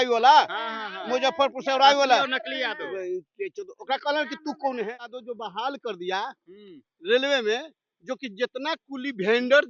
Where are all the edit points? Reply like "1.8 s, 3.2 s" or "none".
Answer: 5.3 s